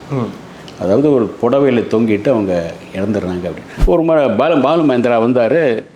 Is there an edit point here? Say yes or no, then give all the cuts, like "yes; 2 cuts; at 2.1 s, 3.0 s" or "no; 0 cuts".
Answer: yes; 1 cut; at 3.8 s